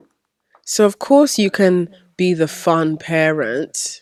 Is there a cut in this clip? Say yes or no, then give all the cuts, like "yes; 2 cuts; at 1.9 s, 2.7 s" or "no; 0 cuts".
no; 0 cuts